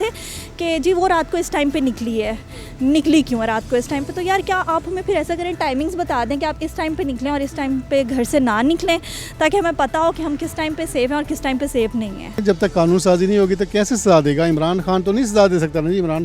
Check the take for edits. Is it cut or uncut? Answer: uncut